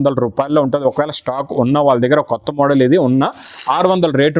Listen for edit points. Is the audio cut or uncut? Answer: uncut